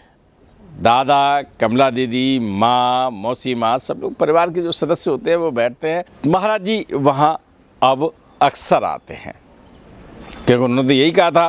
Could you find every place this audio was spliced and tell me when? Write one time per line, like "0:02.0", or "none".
0:06.1